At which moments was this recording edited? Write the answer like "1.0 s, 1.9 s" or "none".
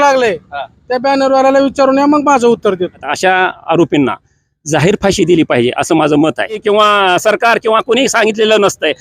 3.1 s, 6.6 s

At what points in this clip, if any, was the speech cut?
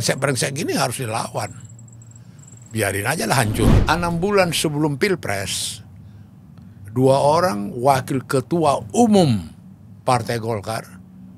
3.8 s

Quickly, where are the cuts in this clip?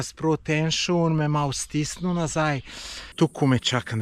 3.0 s

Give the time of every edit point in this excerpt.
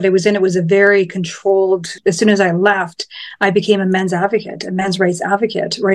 1.9 s

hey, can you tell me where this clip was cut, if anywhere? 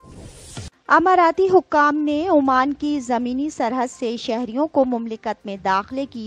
none

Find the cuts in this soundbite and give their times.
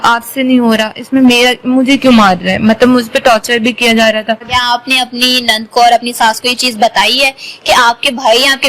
4.4 s

